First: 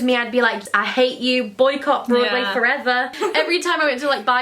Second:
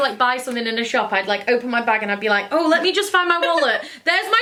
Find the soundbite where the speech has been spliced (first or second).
first